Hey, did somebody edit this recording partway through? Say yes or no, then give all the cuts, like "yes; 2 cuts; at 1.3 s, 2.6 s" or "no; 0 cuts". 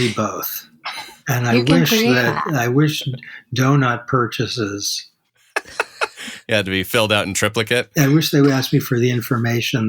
yes; 1 cut; at 7.8 s